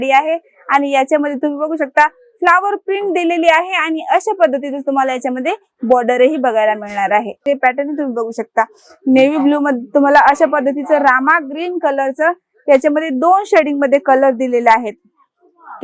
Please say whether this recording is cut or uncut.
cut